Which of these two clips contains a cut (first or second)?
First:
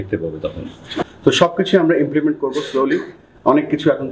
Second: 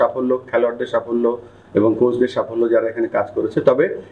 first